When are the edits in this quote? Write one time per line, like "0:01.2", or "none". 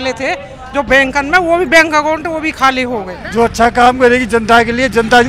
0:03.2